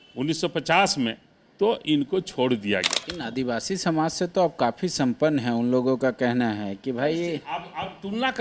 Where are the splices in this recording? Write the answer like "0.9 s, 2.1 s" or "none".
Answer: 3.0 s